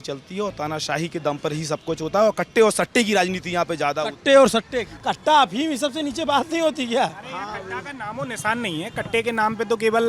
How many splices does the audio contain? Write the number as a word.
one